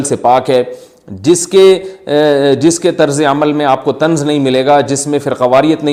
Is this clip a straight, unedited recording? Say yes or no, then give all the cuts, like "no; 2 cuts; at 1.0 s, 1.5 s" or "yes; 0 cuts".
yes; 0 cuts